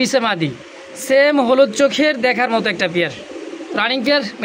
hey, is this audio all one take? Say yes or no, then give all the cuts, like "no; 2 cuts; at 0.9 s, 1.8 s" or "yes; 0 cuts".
yes; 0 cuts